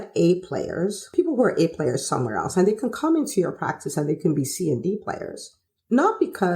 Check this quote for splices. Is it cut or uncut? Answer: cut